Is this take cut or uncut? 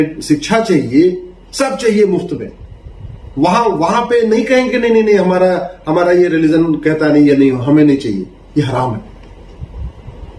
uncut